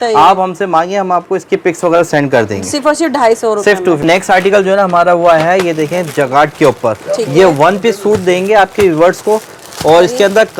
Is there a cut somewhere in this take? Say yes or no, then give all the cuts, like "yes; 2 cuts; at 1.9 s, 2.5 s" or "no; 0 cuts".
no; 0 cuts